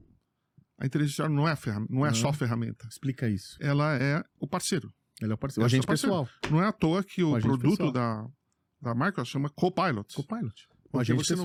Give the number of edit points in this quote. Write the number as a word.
zero